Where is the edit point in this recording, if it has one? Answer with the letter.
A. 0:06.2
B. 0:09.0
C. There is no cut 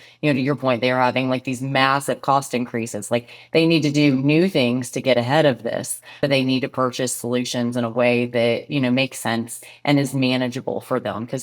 A